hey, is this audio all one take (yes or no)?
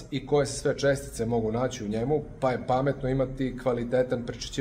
yes